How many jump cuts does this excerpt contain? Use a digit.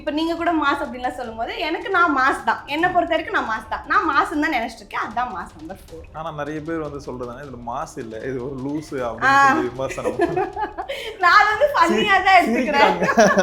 0